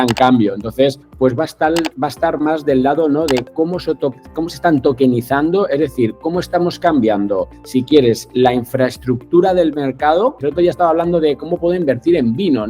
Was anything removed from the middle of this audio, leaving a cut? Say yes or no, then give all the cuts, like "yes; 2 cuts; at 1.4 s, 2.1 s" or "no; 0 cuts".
yes; 2 cuts; at 1.1 s, 10.4 s